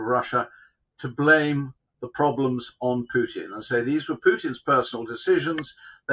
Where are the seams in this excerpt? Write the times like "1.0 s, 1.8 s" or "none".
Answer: none